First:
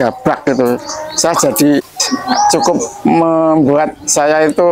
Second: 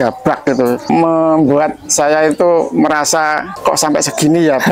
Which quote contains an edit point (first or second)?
second